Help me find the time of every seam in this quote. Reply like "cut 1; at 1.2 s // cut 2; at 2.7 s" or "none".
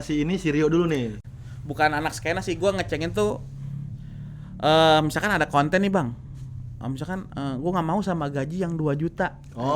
cut 1; at 1.2 s